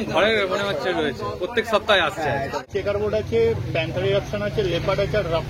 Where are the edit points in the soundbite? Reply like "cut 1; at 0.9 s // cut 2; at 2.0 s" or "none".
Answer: cut 1; at 2.7 s